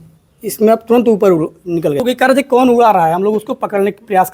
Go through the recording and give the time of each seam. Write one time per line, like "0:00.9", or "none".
0:02.0